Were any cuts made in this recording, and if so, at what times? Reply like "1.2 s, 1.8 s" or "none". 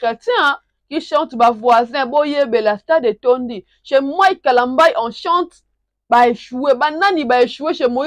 none